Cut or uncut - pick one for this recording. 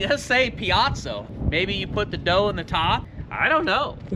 cut